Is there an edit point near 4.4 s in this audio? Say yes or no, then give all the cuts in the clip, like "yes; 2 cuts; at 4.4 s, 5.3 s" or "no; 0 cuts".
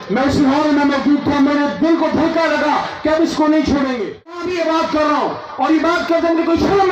yes; 1 cut; at 4.4 s